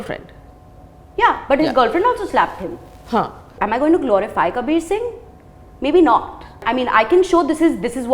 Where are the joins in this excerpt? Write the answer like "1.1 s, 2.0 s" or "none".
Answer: 3.5 s, 6.6 s